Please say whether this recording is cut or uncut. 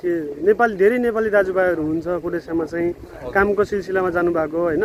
uncut